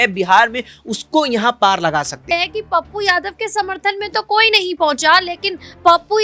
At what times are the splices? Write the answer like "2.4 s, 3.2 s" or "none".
2.2 s